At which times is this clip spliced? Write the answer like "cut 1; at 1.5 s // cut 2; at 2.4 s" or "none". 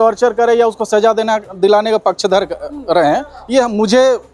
none